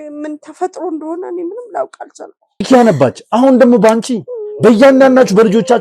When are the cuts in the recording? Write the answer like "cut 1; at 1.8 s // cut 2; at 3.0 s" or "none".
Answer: cut 1; at 2.7 s